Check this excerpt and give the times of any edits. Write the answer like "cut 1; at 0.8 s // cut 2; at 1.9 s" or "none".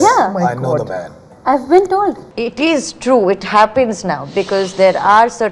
cut 1; at 2.3 s